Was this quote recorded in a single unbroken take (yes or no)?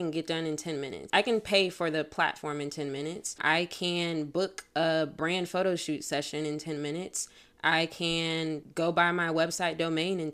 no